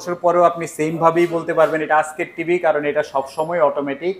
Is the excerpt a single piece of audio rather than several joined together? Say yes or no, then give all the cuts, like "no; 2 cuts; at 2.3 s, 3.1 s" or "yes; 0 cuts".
yes; 0 cuts